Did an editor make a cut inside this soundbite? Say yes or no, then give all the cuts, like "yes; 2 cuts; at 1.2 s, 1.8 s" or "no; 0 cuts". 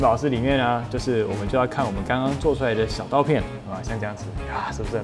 yes; 1 cut; at 3.4 s